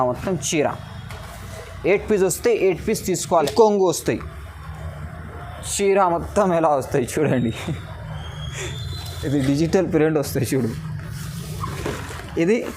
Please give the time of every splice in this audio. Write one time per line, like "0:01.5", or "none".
0:03.5